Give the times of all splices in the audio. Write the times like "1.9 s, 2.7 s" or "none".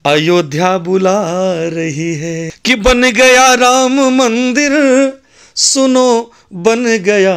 2.6 s